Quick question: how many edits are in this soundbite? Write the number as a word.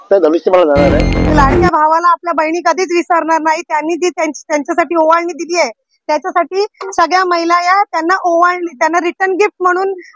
one